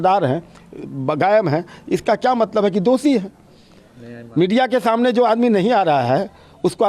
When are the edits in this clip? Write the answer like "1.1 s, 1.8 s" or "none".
none